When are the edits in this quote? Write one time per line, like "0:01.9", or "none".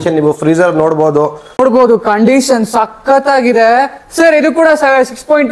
0:01.6

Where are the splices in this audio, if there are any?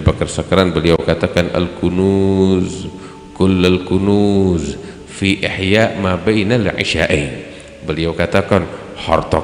none

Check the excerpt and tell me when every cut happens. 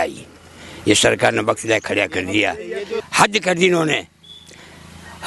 0:03.0

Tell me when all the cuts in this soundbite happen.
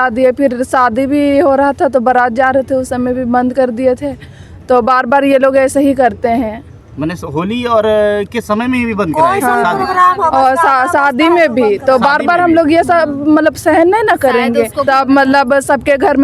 0:14.8

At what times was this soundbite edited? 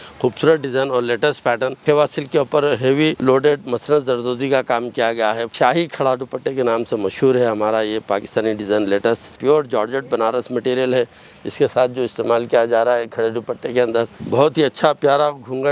0:01.8
0:03.2
0:05.5
0:09.4
0:14.2

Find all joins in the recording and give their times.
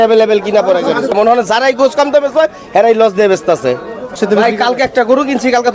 0:01.1
0:04.2

